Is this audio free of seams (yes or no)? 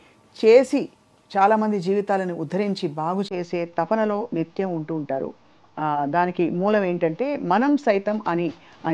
yes